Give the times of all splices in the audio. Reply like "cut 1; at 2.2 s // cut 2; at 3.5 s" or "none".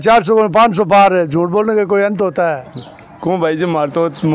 cut 1; at 2.6 s